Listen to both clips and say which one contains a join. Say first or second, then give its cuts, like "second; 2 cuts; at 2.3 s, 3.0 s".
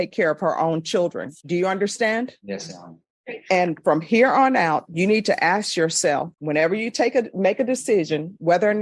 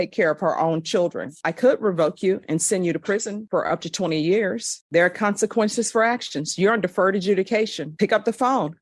second; 2 cuts; at 1.4 s, 4.8 s